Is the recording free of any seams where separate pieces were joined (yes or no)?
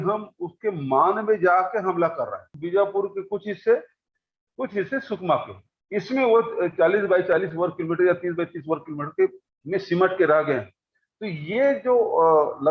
no